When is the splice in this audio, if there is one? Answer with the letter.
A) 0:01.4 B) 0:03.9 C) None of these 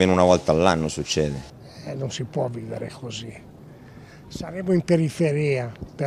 A